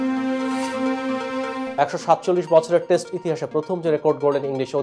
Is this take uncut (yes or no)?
no